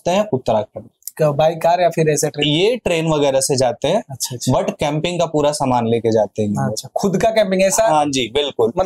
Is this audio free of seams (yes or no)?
yes